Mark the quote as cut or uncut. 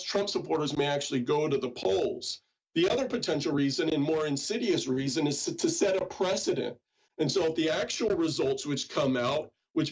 cut